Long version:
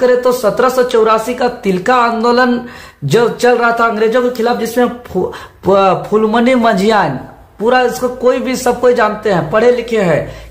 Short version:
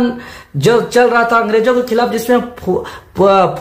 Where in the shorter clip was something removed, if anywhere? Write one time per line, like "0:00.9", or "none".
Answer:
none